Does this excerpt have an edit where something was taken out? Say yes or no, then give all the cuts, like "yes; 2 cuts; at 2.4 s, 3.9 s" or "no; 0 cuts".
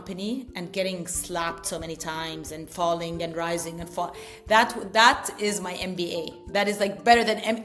no; 0 cuts